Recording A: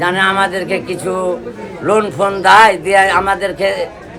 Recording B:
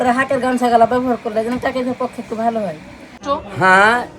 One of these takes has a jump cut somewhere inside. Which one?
B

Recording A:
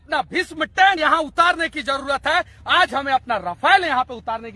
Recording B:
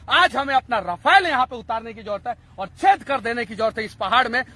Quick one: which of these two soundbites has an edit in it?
A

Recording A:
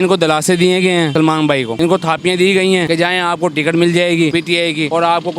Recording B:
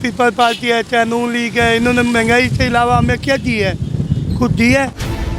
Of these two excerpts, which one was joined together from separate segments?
A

